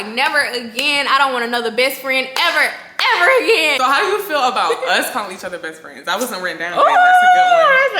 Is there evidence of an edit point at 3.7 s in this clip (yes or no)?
yes